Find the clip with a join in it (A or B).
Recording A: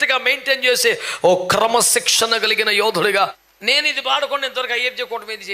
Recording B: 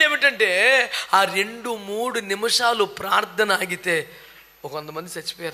A